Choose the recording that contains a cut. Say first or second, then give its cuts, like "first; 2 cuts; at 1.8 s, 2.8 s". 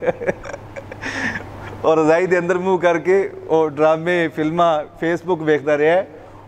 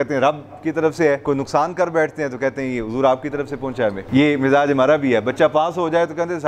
second; 2 cuts; at 1.2 s, 4.0 s